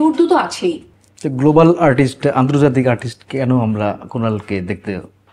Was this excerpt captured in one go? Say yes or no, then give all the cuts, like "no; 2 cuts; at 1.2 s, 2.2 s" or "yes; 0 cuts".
yes; 0 cuts